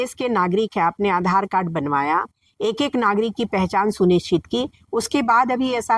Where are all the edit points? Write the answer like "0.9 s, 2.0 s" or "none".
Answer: none